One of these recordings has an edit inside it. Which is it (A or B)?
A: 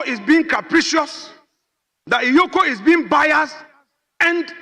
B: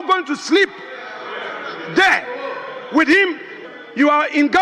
B